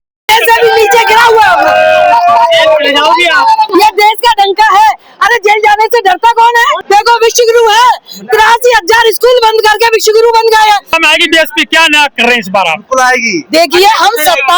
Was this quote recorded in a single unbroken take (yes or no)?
yes